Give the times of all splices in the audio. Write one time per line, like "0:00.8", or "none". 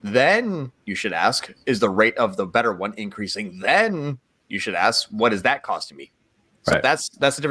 none